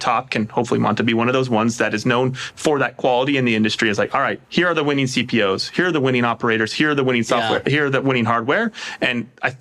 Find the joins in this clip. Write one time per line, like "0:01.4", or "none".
none